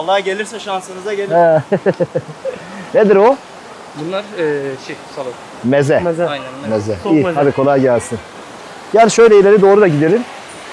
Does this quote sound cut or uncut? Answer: uncut